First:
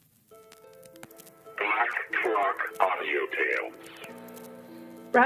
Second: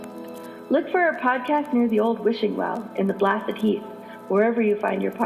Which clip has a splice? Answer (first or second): first